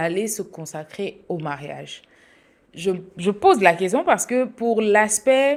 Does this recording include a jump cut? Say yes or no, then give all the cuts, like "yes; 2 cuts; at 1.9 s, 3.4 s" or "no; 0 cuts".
no; 0 cuts